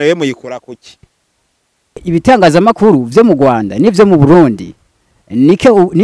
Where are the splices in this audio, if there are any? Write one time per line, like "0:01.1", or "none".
0:02.0